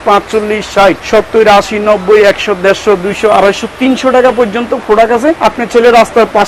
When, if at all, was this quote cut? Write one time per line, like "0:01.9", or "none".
0:01.0
0:05.4